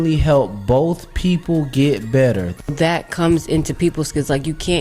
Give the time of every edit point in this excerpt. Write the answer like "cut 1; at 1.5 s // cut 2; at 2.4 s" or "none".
cut 1; at 2.6 s